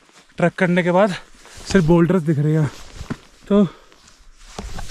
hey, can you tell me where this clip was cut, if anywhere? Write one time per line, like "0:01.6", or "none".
none